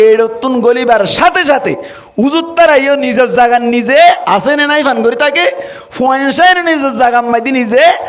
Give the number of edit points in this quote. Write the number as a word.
one